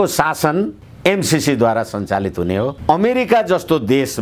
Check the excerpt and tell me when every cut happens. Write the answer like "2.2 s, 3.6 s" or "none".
2.8 s